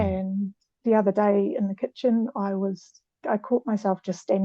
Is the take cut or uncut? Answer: uncut